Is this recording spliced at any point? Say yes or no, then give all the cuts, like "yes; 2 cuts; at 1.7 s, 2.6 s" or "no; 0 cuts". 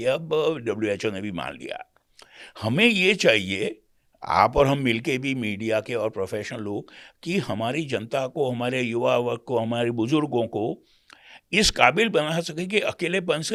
no; 0 cuts